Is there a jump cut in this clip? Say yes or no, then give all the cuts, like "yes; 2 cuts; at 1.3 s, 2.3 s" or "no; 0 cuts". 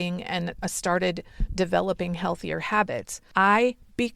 yes; 1 cut; at 3.2 s